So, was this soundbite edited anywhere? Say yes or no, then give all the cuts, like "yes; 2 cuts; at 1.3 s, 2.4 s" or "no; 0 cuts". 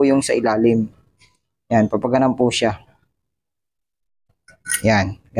no; 0 cuts